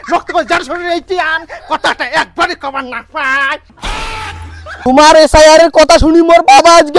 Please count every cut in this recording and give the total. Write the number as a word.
one